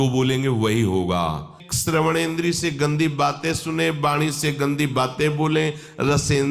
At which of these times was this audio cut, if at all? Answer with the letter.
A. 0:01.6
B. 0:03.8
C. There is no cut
A